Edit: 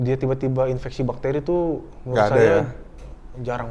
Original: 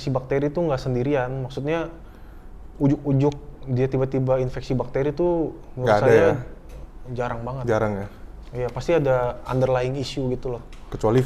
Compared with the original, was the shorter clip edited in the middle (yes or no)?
no